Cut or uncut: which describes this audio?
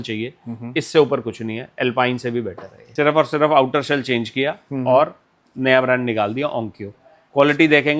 cut